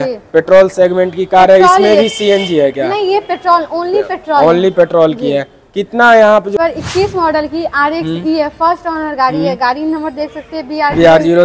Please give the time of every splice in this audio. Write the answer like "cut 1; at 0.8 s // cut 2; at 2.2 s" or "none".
cut 1; at 6.5 s

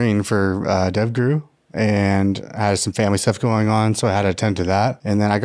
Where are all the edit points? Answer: none

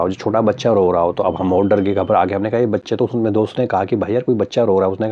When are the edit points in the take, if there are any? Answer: none

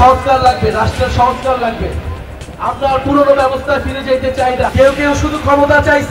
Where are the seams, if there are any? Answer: cut 1; at 4.7 s

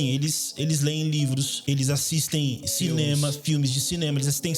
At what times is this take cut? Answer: cut 1; at 1.5 s

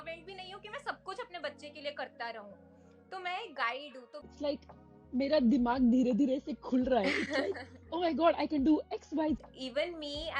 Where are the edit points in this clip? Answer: cut 1; at 4.2 s // cut 2; at 9.4 s

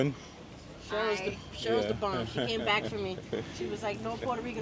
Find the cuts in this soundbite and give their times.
none

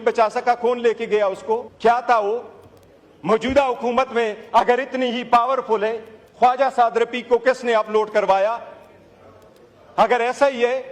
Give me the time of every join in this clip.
cut 1; at 1.7 s

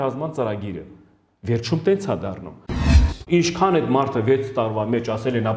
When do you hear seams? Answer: cut 1; at 2.9 s

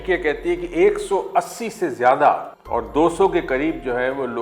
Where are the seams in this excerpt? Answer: cut 1; at 2.5 s

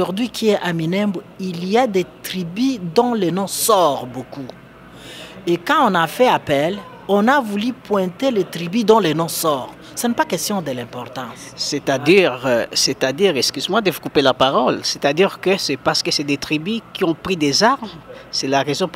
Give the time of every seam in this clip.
none

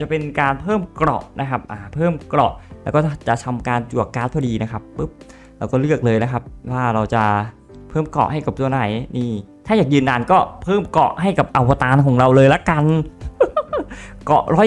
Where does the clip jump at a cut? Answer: none

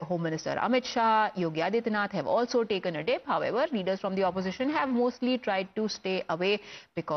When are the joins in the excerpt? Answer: none

